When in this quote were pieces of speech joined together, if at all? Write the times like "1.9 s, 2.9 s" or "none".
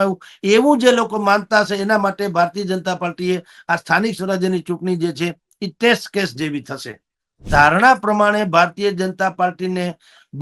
7.5 s